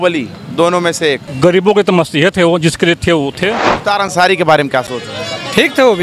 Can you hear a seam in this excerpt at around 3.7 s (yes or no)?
yes